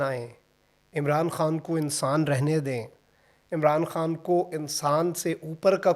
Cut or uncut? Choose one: uncut